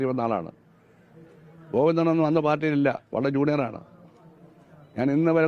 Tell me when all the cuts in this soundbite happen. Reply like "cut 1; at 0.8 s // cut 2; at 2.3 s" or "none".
none